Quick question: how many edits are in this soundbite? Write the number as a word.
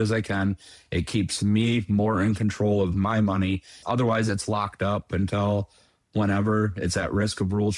one